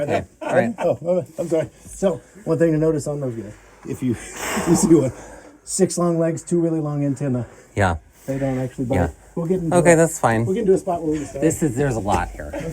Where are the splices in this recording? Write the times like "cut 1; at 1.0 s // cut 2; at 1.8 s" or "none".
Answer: cut 1; at 11.3 s